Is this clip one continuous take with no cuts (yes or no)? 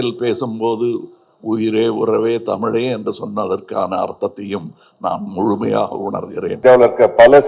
no